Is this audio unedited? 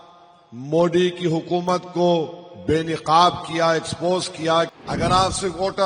no; 1 cut; at 4.7 s

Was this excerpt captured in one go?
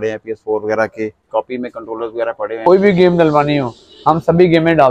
no; 2 cuts; at 1.3 s, 2.6 s

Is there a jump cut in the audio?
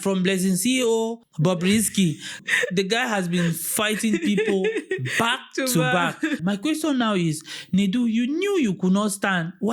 yes; 3 cuts; at 1.2 s, 2.4 s, 6.4 s

